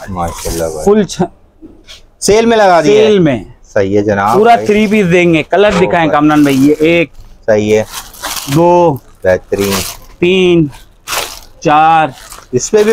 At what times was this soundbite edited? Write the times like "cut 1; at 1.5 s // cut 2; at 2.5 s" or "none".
none